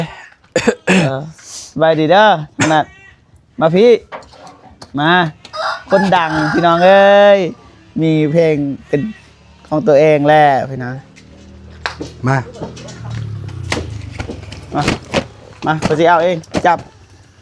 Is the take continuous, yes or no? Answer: yes